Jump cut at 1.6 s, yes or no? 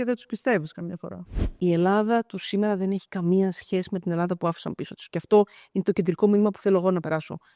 yes